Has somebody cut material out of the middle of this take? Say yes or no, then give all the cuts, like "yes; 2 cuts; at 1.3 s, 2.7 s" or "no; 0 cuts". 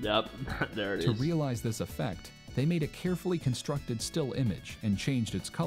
no; 0 cuts